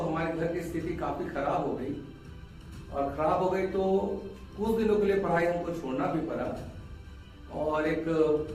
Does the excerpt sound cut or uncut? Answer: uncut